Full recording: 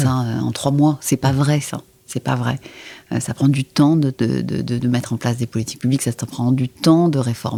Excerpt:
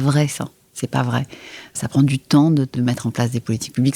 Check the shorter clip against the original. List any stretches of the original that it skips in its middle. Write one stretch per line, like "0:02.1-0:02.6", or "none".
0:03.1-0:03.2
0:04.2-0:04.8